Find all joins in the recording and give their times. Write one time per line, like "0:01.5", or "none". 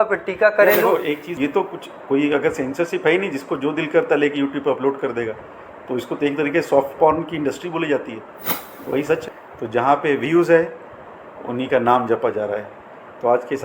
0:01.3
0:09.2